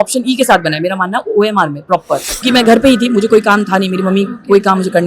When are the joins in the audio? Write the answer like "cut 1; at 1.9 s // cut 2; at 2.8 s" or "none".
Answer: cut 1; at 2.4 s